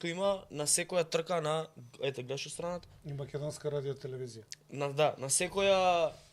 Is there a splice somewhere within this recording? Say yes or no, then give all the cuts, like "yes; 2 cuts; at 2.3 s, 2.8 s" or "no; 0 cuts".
no; 0 cuts